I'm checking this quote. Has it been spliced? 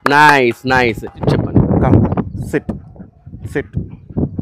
no; 0 cuts

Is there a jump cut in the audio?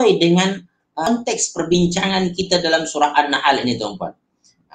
yes; 1 cut; at 1.1 s

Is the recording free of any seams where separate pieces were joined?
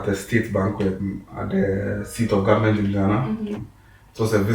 no; 2 cuts; at 1.0 s, 3.5 s

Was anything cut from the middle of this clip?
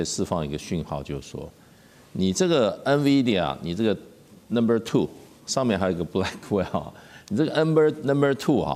no; 0 cuts

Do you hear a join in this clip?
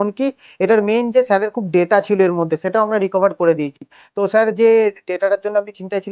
no; 0 cuts

